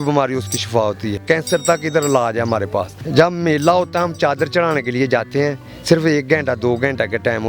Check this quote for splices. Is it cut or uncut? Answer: cut